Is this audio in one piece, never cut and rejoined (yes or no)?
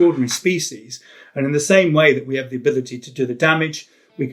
yes